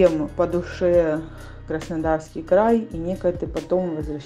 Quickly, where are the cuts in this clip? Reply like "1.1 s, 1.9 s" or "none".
none